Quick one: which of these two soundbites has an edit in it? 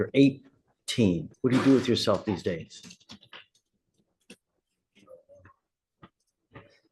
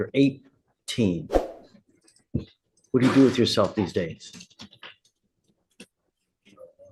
first; 1 cut; at 1.2 s

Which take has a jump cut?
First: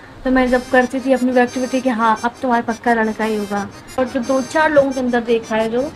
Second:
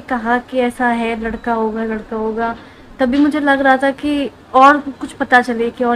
first; 1 cut; at 4.0 s

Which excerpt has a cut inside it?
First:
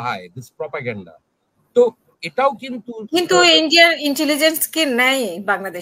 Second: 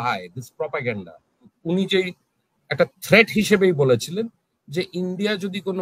second; 1 cut; at 1.5 s

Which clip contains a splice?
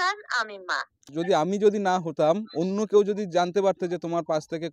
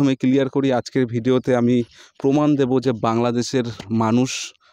first; 1 cut; at 1.0 s

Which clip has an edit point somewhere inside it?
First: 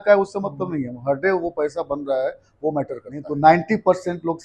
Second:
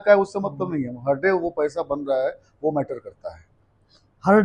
first; 1 cut; at 3.2 s

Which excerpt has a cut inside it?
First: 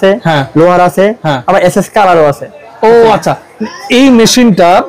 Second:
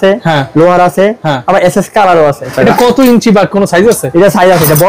second; 1 cut; at 2.5 s

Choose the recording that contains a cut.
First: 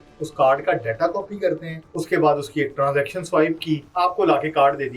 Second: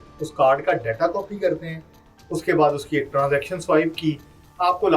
first; 2 cuts; at 1.8 s, 3.9 s

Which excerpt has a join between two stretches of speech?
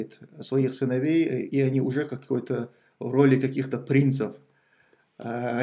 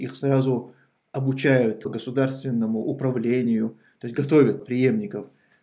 second; 2 cuts; at 1.9 s, 4.6 s

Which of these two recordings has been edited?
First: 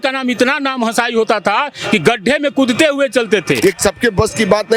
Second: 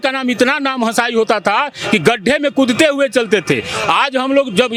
first; 1 cut; at 3.6 s

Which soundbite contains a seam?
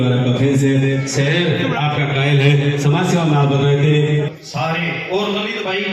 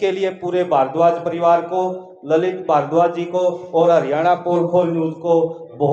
first; 1 cut; at 4.3 s

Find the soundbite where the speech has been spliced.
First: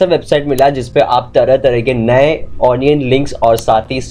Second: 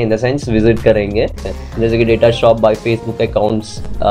second; 1 cut; at 1.3 s

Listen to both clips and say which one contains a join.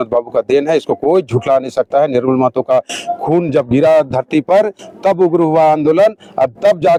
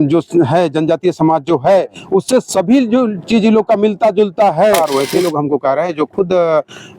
second; 1 cut; at 4.8 s

